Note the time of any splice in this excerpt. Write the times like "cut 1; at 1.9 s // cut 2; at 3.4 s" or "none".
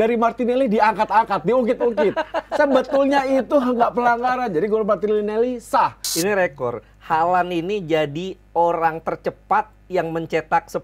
cut 1; at 6.0 s